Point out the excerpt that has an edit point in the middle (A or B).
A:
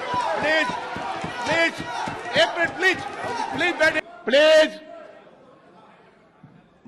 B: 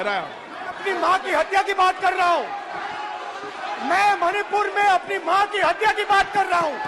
A